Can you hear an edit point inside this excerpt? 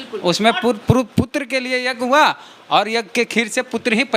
no; 0 cuts

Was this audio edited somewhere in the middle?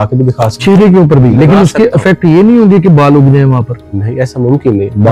no; 0 cuts

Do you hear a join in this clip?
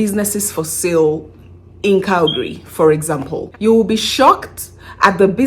yes; 1 cut; at 3.4 s

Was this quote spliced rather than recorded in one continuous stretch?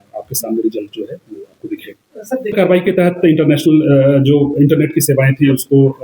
yes; 1 cut; at 2.5 s

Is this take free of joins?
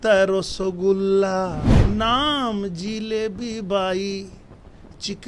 no; 1 cut; at 1.7 s

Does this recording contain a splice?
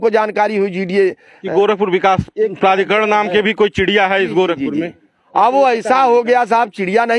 no; 0 cuts

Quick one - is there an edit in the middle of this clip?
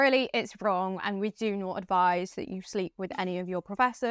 no; 0 cuts

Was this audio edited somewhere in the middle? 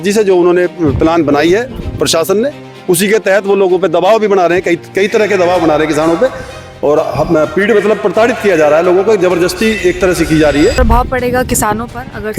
yes; 1 cut; at 10.8 s

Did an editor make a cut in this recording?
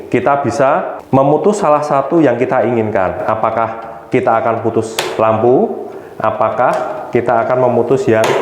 yes; 1 cut; at 1.0 s

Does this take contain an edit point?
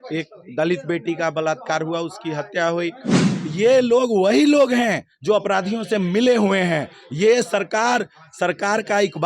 yes; 1 cut; at 3.1 s

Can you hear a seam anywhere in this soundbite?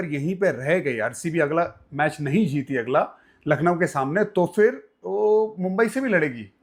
no; 0 cuts

